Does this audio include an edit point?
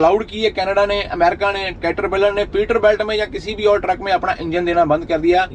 no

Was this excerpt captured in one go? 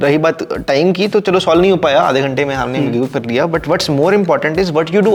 yes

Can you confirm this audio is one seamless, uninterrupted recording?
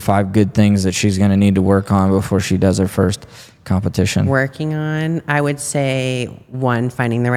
yes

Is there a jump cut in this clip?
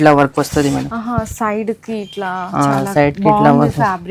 no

